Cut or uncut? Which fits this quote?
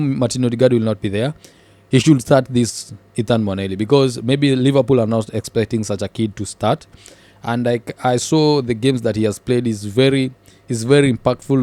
uncut